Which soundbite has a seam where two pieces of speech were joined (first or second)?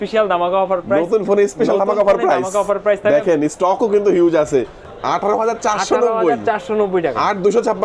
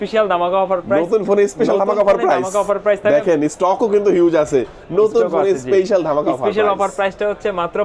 first